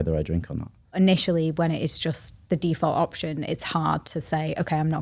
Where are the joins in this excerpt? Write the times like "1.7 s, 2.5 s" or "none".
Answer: 1.0 s